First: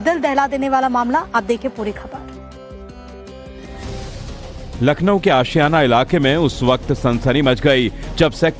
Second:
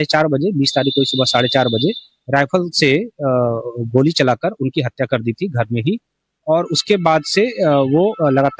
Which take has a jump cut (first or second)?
second